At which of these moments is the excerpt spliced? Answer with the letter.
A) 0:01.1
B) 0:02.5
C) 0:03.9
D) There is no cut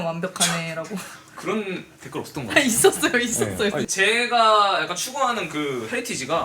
C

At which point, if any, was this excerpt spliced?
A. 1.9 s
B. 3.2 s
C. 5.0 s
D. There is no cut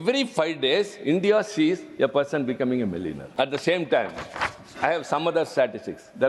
B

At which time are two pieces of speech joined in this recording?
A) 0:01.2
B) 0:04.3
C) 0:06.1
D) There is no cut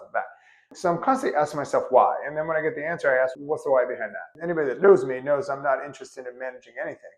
B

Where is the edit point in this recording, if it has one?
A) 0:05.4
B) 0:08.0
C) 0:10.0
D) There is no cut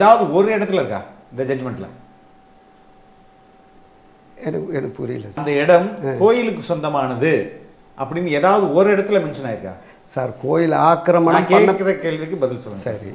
A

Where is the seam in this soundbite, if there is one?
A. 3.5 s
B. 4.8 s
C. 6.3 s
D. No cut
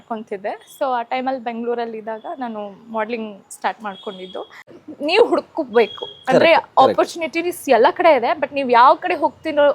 B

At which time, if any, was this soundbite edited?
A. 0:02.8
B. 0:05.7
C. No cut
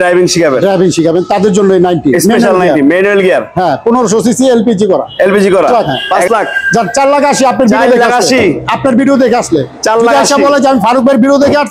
B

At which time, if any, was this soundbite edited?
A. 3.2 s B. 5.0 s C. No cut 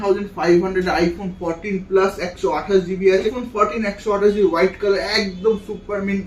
A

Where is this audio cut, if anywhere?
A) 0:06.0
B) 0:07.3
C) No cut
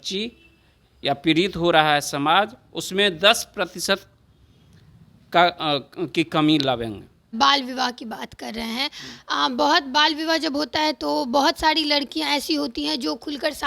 B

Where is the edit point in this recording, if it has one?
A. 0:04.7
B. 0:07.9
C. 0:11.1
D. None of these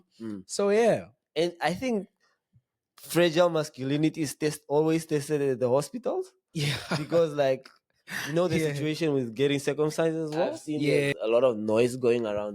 C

